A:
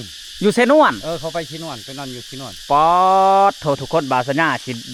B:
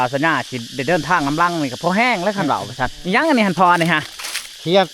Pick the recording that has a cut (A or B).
B